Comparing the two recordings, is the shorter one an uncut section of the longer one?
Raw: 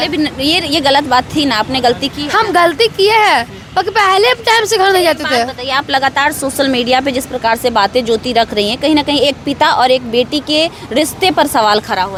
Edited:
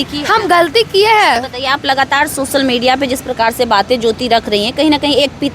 no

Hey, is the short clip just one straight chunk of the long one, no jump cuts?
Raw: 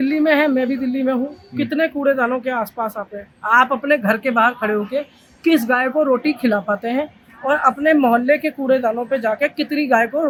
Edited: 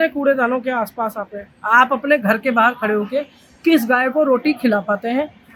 yes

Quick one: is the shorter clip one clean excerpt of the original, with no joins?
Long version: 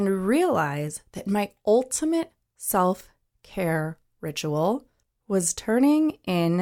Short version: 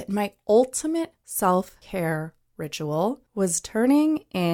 no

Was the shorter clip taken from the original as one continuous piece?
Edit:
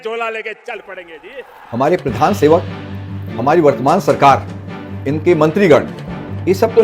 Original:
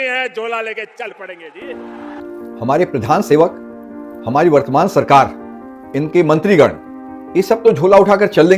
no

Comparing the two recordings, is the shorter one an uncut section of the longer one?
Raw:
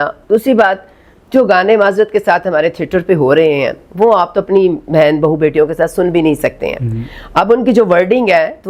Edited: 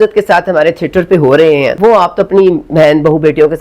no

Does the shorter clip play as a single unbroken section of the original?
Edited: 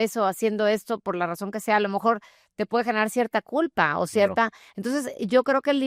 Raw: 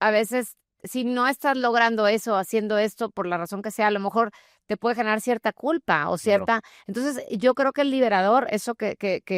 yes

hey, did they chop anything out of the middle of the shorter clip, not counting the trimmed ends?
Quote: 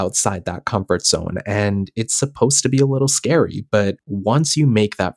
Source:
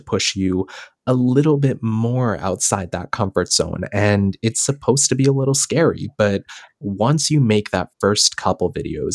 yes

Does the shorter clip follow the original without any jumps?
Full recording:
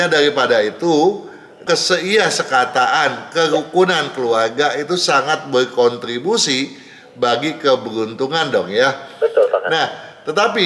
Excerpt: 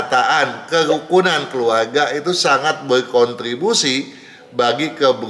yes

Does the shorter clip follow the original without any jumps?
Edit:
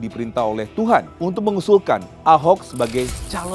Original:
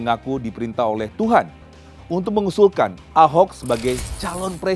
no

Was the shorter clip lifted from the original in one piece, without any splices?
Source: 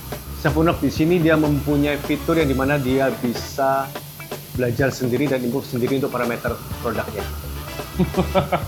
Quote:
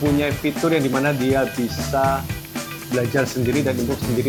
yes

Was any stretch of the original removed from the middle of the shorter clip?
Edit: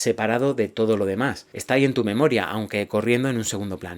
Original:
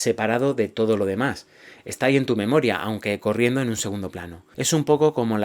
yes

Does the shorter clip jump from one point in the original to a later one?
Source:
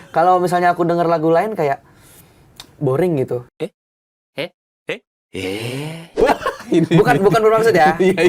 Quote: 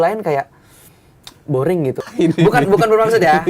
yes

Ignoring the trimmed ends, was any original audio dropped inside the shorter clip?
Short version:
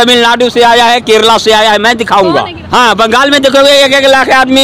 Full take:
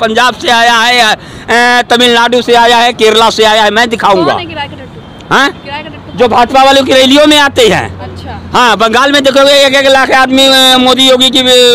yes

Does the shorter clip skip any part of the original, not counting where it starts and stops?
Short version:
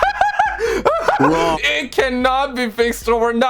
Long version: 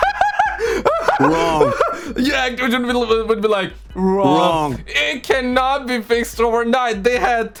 yes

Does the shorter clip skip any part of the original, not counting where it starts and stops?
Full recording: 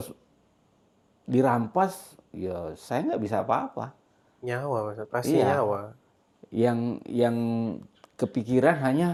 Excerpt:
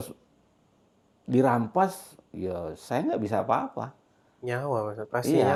no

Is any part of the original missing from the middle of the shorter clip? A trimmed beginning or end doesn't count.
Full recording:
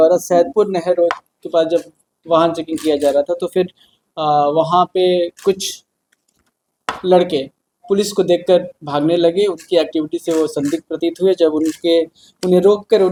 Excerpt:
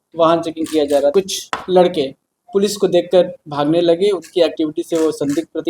yes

